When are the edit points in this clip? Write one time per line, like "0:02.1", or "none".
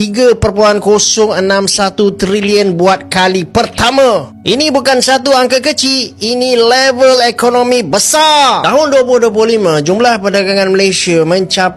none

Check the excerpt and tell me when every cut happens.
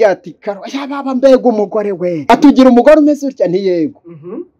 0:02.2

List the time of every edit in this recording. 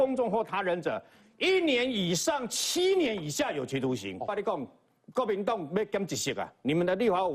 0:04.3

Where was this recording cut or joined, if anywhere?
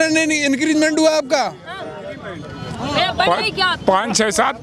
none

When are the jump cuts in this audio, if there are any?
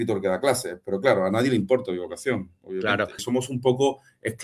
0:03.2

